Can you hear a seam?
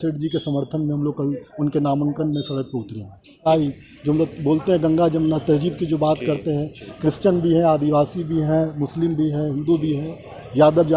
yes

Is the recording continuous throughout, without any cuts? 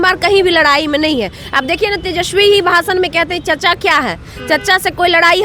yes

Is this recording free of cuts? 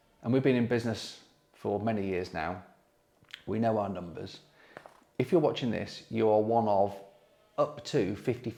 yes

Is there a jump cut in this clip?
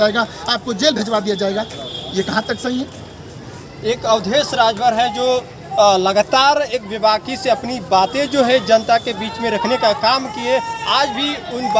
no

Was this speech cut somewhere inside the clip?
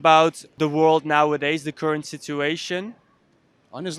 no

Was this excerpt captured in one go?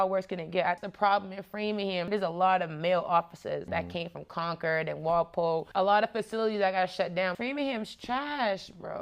no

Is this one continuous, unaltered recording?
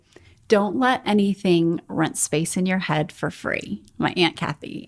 yes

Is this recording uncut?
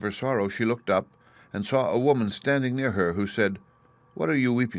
yes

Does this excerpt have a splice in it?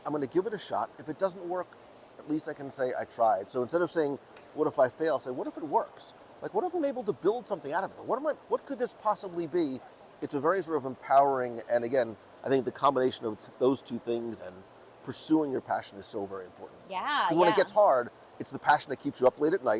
no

